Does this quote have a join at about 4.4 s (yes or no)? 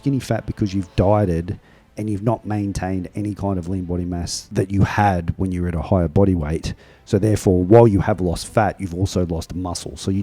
yes